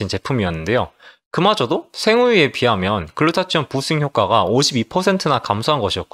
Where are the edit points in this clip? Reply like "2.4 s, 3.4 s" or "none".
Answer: none